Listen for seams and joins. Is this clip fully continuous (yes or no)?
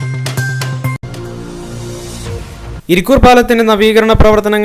yes